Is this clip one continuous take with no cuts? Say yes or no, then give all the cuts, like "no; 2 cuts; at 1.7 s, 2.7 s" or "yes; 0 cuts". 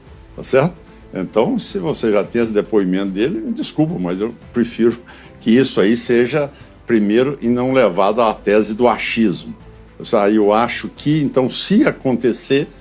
yes; 0 cuts